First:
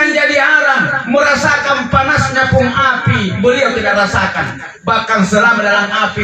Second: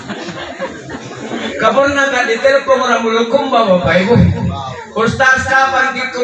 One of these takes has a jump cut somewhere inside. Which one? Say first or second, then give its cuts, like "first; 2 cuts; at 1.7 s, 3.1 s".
second; 1 cut; at 1.5 s